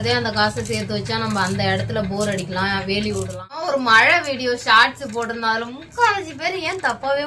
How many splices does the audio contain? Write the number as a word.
one